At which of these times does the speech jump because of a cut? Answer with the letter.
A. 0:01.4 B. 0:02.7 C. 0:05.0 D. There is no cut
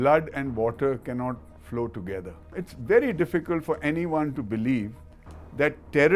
B